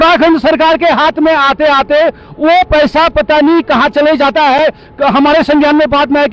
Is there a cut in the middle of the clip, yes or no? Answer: no